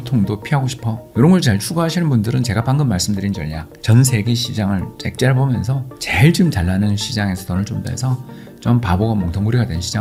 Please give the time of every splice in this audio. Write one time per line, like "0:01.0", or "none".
none